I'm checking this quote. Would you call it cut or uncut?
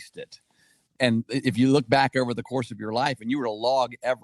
cut